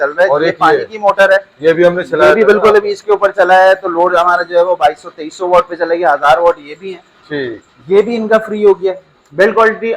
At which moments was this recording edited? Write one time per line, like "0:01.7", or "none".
0:09.1